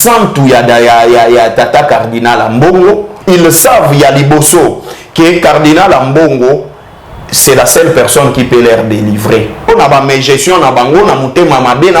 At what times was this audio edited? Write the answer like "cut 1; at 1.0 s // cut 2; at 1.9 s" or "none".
cut 1; at 3.1 s // cut 2; at 9.7 s